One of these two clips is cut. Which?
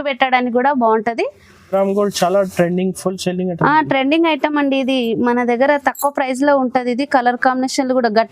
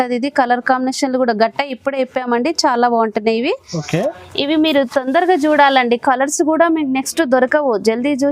first; 1 cut; at 1.7 s

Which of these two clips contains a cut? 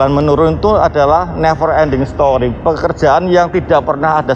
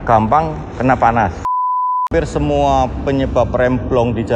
second; 1 cut; at 1.7 s

